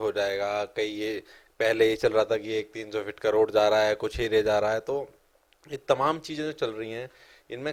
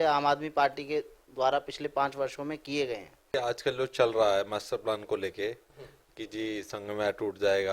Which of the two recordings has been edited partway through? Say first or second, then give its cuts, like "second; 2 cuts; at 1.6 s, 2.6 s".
second; 1 cut; at 3.3 s